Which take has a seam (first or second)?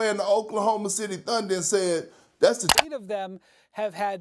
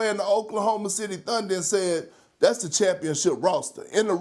first